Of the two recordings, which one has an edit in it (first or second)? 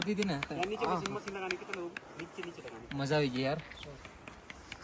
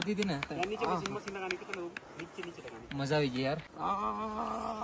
second